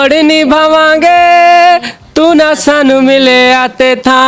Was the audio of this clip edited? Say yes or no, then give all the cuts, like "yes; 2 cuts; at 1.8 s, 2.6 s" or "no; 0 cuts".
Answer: no; 0 cuts